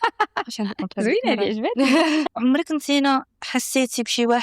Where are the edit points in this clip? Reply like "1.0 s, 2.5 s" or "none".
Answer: 2.3 s